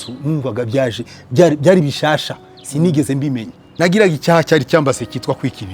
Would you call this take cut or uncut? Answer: cut